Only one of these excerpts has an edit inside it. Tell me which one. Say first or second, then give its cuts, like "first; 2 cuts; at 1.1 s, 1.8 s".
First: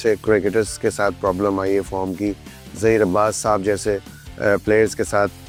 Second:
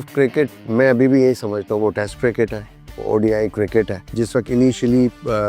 second; 1 cut; at 4.0 s